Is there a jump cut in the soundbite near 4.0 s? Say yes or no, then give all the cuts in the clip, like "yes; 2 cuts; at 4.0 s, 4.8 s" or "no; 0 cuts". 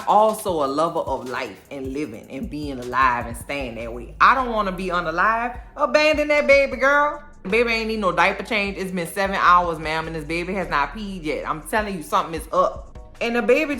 no; 2 cuts; at 7.5 s, 12.8 s